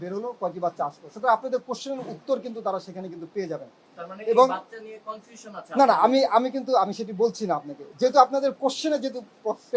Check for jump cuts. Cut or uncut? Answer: uncut